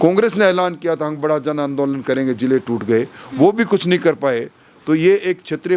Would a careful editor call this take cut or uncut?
uncut